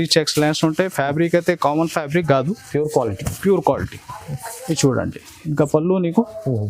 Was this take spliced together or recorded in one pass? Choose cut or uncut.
uncut